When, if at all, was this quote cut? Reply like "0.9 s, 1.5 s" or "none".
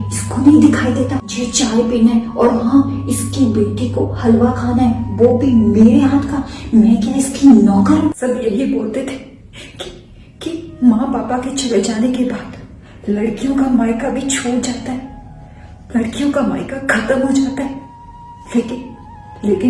1.4 s, 8.2 s